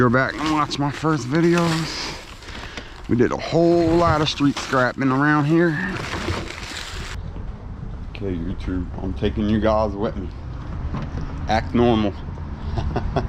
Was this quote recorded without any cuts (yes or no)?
no